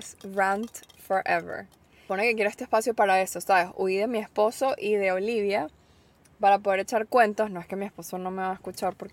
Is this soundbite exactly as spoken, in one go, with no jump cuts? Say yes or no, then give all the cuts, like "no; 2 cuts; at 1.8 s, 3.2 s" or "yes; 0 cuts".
no; 1 cut; at 2.0 s